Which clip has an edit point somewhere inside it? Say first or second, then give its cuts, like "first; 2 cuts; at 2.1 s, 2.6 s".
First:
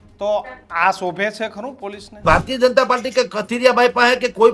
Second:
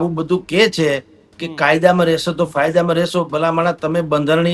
first; 1 cut; at 2.2 s